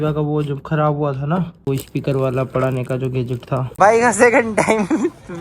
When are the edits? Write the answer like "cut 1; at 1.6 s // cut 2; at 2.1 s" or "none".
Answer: cut 1; at 1.7 s // cut 2; at 3.6 s